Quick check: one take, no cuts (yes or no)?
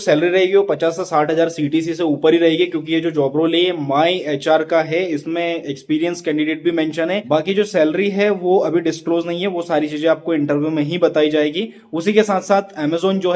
yes